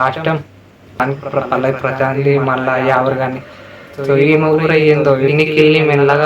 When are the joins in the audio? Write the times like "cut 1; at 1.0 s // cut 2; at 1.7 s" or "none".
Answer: cut 1; at 1.0 s